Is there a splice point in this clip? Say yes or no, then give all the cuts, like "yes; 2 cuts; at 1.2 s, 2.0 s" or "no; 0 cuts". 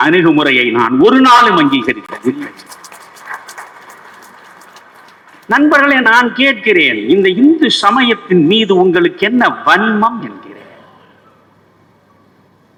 no; 0 cuts